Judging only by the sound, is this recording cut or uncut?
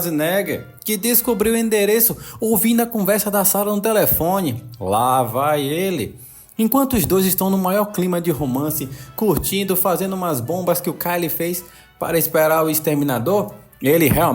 uncut